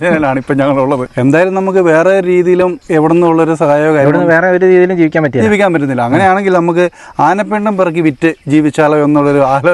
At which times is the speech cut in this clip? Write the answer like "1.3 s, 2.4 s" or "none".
1.1 s, 2.8 s